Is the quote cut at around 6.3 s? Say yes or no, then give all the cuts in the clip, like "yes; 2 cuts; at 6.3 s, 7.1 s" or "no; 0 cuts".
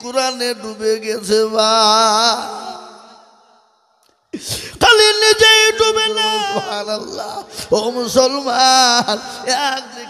yes; 1 cut; at 6.3 s